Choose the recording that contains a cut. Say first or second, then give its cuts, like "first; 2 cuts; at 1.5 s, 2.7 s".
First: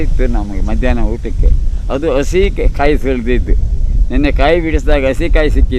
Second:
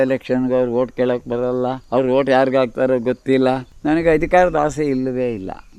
second; 2 cuts; at 1.8 s, 3.7 s